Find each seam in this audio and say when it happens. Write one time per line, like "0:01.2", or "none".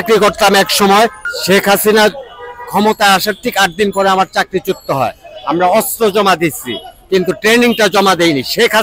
0:01.3